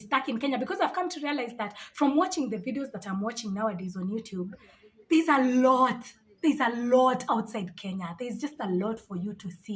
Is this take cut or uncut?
uncut